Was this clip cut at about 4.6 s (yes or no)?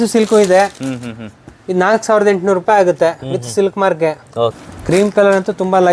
yes